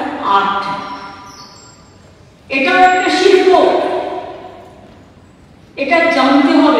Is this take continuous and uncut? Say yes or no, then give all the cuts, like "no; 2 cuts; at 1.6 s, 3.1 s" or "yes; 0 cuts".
yes; 0 cuts